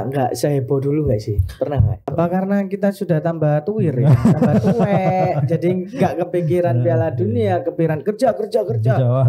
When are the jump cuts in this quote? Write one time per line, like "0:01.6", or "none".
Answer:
0:02.0